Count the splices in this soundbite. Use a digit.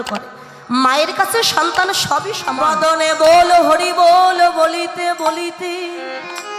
1